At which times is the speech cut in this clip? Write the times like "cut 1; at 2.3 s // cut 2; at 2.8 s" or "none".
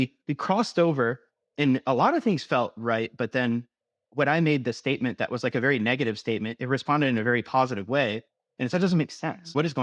none